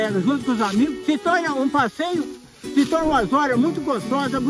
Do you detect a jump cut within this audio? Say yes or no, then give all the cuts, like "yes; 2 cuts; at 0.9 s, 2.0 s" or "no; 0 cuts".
yes; 1 cut; at 1.0 s